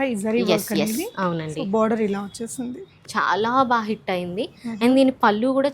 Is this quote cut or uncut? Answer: cut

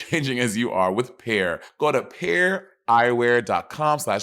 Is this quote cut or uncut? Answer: cut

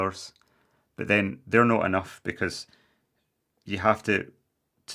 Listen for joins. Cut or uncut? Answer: uncut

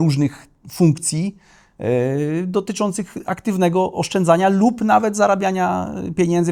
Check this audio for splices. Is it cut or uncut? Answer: uncut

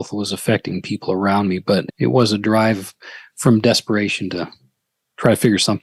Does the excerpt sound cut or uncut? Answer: uncut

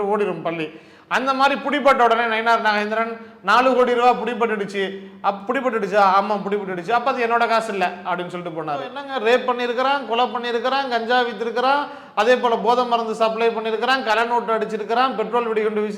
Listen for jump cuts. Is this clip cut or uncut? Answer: cut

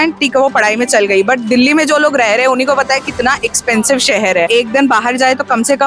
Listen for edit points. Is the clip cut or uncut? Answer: cut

